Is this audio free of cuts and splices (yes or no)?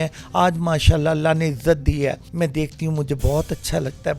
no